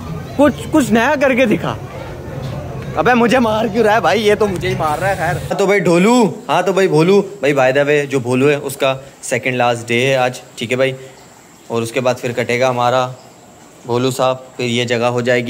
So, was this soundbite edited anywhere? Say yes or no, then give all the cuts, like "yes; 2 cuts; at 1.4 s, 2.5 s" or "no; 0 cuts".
yes; 1 cut; at 5.5 s